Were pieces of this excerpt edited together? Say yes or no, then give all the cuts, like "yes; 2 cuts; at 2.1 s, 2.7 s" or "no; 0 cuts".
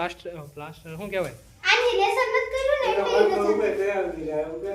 yes; 1 cut; at 1.6 s